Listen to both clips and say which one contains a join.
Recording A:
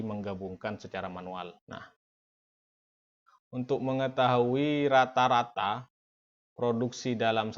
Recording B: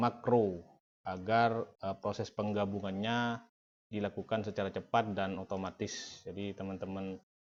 A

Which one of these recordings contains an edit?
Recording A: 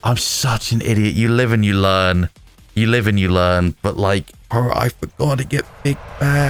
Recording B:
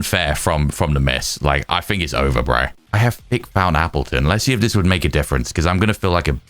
B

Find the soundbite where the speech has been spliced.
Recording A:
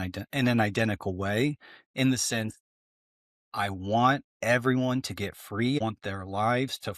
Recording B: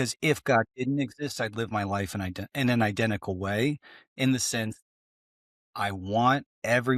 A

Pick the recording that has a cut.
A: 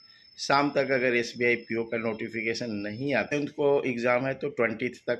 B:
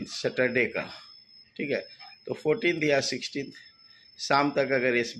A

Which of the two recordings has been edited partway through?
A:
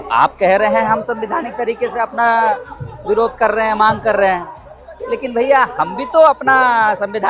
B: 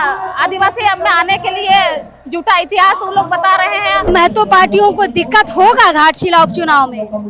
B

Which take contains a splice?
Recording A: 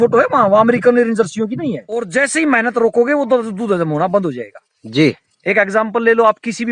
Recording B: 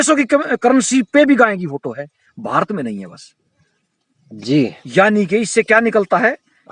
A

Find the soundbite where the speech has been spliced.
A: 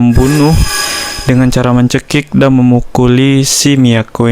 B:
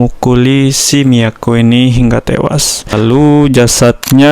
B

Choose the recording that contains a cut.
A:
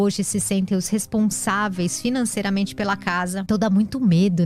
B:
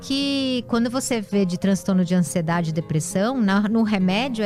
A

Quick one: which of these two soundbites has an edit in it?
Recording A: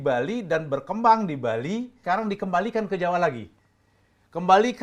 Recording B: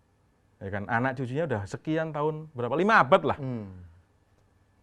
A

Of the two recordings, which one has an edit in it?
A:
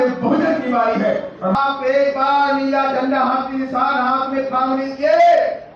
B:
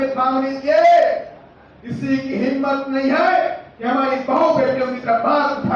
A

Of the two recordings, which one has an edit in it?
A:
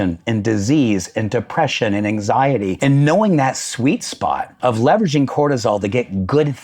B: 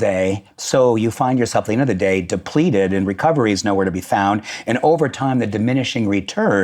A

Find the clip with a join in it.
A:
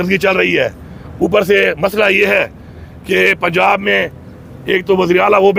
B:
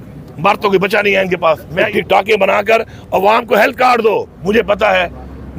B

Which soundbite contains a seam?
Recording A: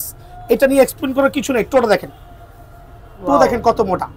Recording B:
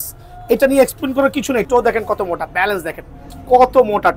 B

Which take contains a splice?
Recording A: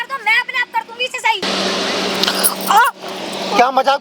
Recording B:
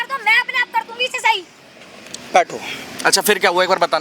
A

